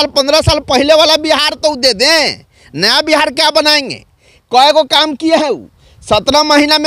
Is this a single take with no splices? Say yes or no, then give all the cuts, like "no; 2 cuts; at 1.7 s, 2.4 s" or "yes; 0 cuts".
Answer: yes; 0 cuts